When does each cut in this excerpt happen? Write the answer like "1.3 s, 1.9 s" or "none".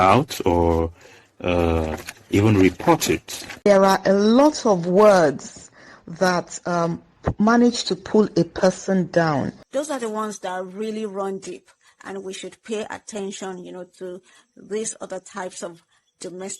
3.7 s, 9.6 s

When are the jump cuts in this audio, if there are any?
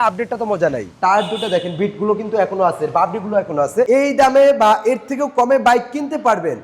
0.9 s, 3.9 s

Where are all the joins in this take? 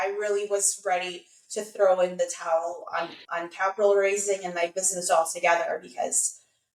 none

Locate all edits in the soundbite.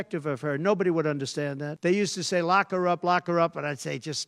1.7 s

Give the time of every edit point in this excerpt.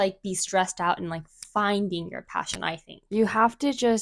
none

